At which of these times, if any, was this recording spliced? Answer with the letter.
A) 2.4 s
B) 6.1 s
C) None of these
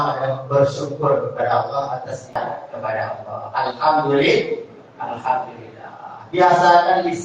A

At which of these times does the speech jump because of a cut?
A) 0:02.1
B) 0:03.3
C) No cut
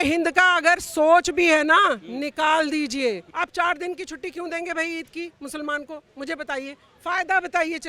B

